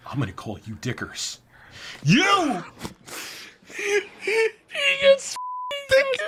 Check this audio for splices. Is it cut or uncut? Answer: uncut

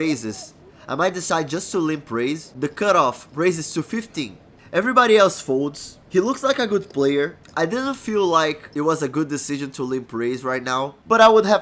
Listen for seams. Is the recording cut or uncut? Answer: cut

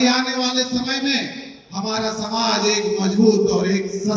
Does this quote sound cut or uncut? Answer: uncut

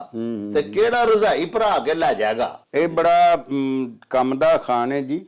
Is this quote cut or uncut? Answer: uncut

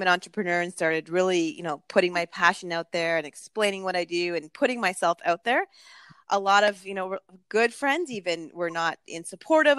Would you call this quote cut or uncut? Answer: uncut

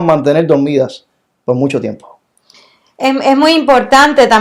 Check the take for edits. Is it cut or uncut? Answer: uncut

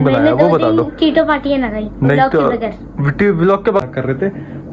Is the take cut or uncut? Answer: cut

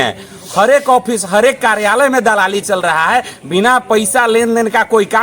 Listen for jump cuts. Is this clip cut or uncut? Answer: uncut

